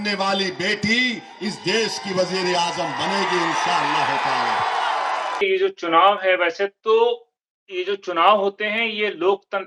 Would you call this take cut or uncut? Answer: cut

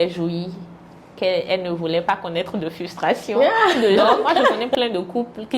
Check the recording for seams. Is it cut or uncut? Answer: cut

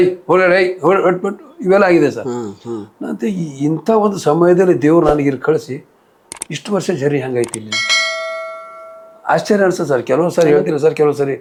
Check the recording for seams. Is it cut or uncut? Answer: uncut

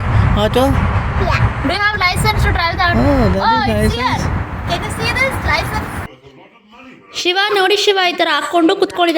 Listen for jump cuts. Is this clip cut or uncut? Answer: cut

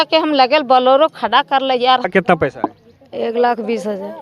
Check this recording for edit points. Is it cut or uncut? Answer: cut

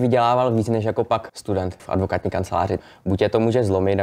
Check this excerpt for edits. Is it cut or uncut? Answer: cut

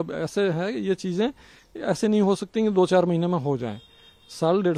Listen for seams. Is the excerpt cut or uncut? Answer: uncut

